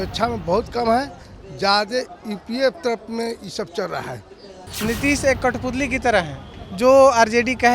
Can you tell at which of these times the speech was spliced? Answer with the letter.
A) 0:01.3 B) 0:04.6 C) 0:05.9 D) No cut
B